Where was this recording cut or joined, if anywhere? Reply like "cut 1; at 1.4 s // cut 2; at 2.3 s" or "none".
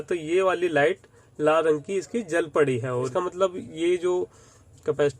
cut 1; at 3.1 s

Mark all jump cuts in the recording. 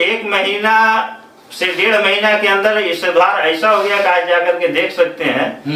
none

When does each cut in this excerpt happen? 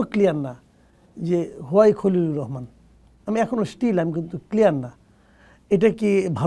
none

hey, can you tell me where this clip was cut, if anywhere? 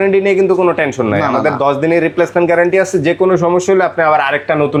none

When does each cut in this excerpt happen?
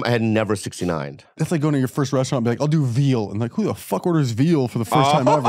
cut 1; at 1.4 s

